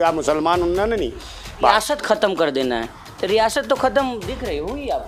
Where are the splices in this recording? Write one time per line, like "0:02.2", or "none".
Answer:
0:01.7